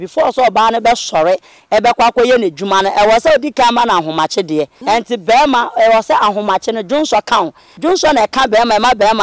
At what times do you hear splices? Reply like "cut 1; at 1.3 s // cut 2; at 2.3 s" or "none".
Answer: cut 1; at 4.8 s // cut 2; at 7.6 s